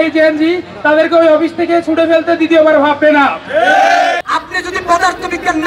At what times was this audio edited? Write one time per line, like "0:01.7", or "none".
0:04.2